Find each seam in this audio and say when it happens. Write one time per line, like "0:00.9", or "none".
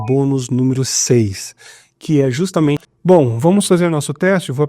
0:02.9